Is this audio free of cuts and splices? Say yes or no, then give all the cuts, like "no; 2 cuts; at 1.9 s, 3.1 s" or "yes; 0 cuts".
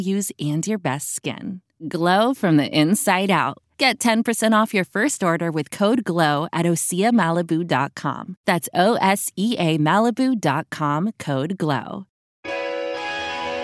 no; 1 cut; at 12.4 s